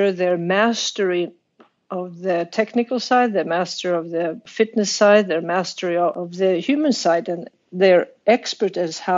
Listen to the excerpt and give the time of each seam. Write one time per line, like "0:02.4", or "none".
0:04.4
0:06.1
0:07.6